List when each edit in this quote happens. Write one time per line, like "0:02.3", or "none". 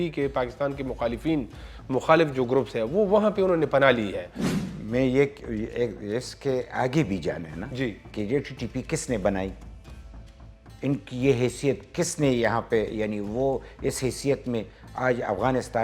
0:04.2

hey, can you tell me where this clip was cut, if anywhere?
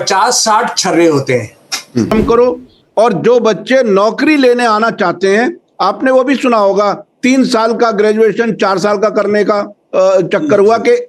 0:02.1

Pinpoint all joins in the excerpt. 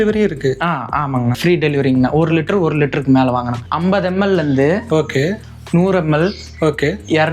0:03.6

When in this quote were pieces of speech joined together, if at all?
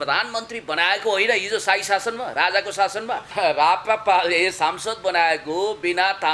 0:03.3

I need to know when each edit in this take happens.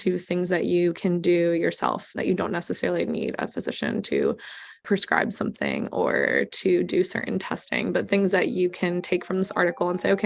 0:02.2
0:04.8

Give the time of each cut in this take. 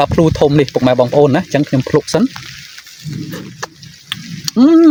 none

